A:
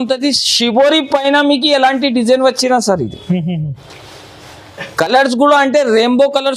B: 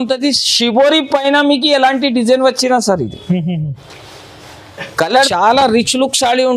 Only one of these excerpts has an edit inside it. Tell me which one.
B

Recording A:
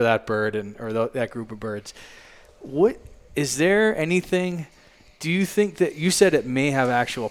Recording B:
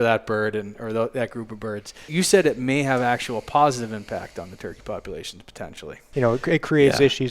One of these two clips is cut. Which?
B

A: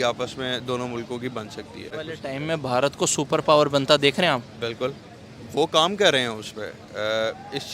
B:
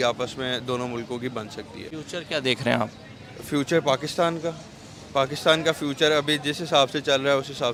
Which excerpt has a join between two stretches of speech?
A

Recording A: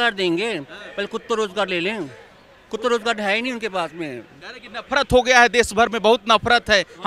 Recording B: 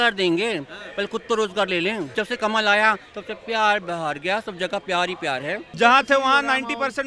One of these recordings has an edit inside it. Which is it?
B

